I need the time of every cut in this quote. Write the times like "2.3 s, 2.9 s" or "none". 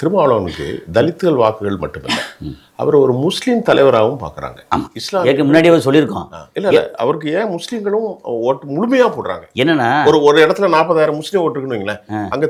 none